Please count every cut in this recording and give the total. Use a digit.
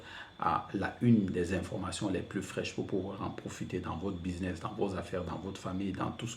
0